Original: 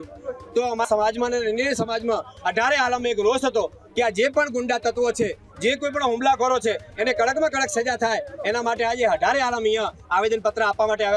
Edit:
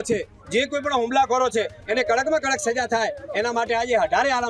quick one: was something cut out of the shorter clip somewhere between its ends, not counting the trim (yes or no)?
no